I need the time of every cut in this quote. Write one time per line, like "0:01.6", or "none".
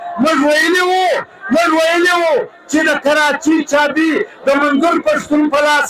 none